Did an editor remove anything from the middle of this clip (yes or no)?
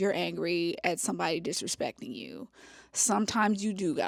no